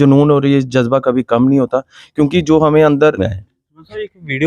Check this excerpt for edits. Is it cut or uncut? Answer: cut